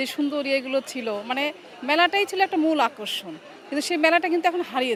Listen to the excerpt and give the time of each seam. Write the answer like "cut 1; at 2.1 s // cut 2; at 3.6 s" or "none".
none